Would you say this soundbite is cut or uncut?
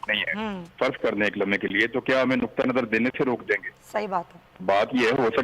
uncut